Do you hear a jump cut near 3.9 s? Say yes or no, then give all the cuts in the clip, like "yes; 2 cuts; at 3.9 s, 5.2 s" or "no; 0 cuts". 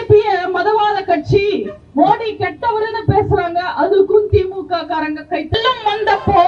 no; 1 cut; at 5.5 s